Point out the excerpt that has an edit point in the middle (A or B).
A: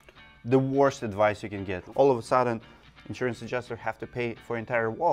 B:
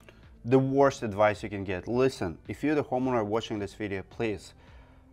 A